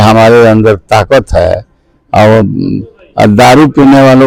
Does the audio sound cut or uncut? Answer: uncut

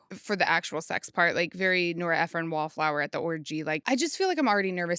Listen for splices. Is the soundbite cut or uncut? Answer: cut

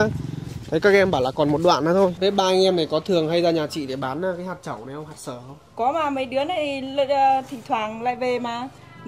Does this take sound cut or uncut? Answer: cut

